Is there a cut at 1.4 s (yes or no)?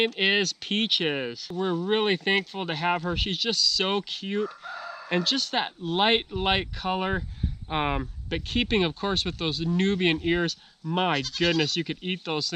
yes